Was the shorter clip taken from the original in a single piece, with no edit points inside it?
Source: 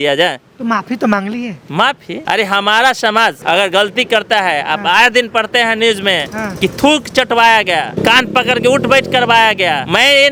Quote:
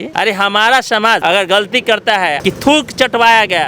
no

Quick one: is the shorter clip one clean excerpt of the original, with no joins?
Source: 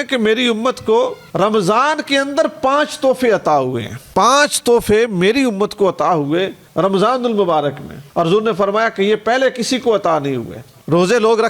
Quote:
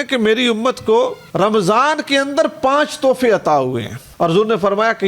no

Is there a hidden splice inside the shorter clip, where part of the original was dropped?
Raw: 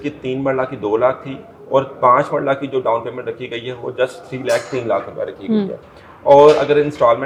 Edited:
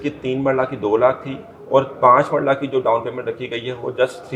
no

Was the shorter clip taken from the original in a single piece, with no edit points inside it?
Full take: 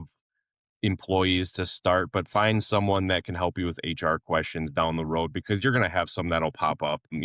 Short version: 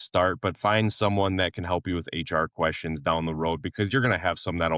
yes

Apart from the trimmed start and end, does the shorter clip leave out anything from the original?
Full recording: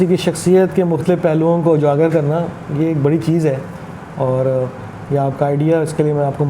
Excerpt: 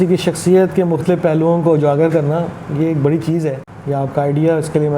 yes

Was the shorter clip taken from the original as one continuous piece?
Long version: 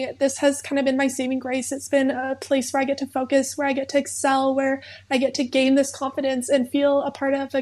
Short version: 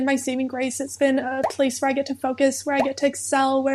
yes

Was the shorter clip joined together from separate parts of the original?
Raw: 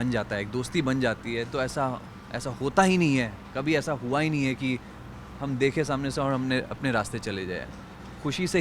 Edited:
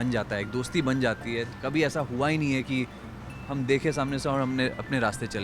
yes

